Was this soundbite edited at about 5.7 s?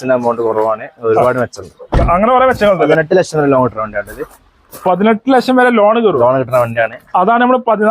no; 1 cut; at 2.9 s

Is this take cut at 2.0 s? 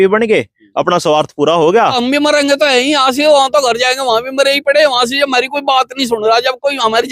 yes; 1 cut; at 2.0 s

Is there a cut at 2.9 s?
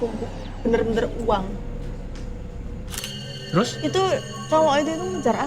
yes; 1 cut; at 2.9 s

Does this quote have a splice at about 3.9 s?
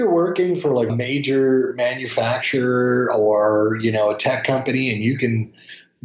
no; 1 cut; at 0.9 s

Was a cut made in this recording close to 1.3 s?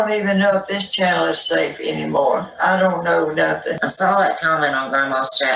no; 1 cut; at 3.8 s

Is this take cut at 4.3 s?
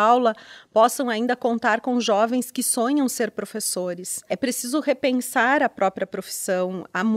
yes; 1 cut; at 4.3 s

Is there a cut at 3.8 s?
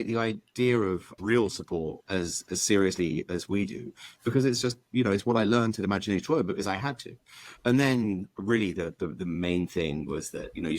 no; 1 cut; at 1.2 s

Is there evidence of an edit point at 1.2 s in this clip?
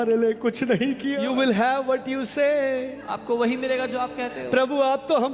yes; 1 cut; at 1.2 s

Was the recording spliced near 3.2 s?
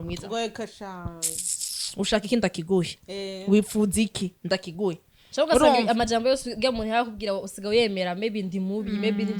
no; 0 cuts

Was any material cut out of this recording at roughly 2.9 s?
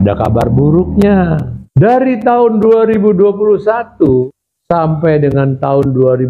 no; 2 cuts; at 1.6 s, 4.5 s

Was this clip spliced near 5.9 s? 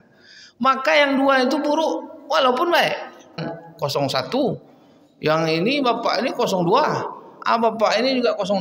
no; 1 cut; at 3.4 s

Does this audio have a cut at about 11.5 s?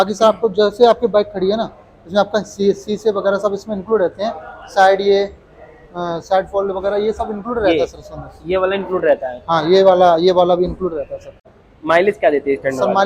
yes; 1 cut; at 11.5 s

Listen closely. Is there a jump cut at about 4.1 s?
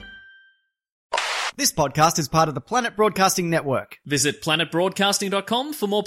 no; 1 cut; at 1.1 s

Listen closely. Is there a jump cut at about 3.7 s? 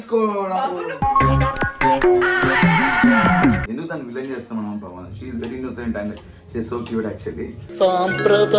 yes; 1 cut; at 3.7 s

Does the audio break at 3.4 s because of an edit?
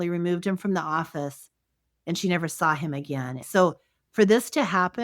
yes; 1 cut; at 3.4 s

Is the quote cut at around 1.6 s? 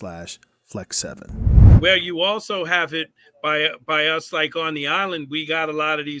yes; 1 cut; at 1.6 s

